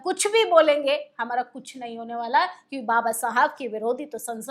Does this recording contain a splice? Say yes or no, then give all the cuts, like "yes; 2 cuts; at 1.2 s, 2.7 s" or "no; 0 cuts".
no; 0 cuts